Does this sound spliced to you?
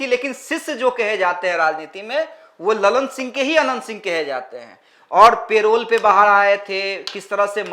no; 0 cuts

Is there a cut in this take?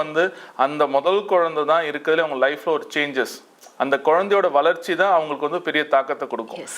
no; 0 cuts

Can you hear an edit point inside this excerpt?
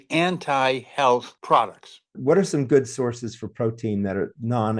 yes; 1 cut; at 2.2 s

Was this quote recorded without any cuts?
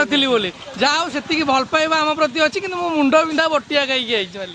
yes; 0 cuts

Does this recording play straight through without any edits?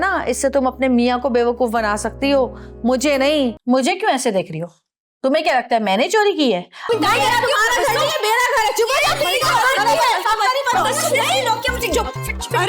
no; 2 cuts; at 3.6 s, 6.8 s

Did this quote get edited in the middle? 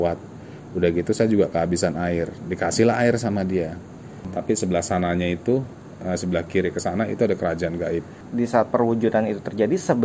yes; 2 cuts; at 4.2 s, 8.2 s

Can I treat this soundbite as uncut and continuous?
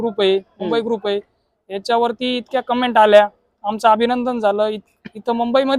yes; 0 cuts

